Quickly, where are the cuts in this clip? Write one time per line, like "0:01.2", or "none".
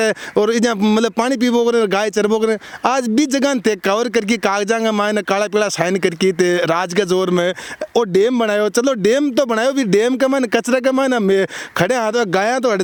none